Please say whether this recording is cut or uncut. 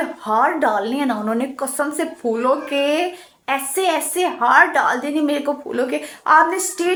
uncut